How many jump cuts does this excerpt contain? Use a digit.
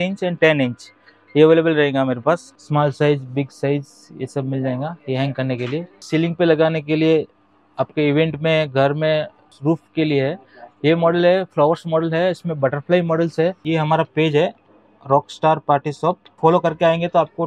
5